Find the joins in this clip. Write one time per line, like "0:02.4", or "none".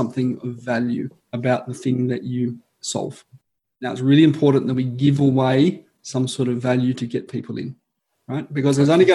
0:01.2